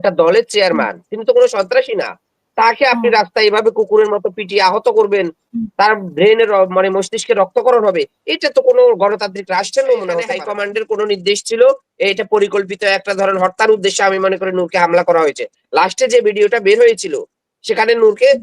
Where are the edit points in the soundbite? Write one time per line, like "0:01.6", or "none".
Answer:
0:10.4

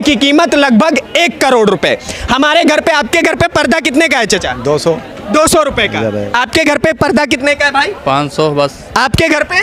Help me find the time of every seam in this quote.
none

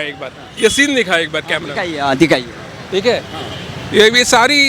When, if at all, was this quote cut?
none

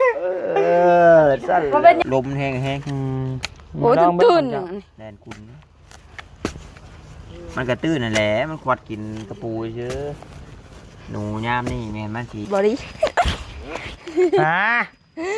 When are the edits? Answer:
0:02.0
0:12.5

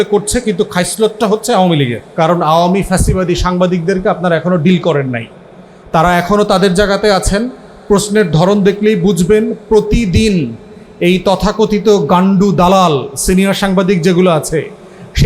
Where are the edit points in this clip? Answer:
0:02.0

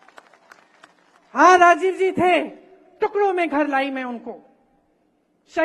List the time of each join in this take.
none

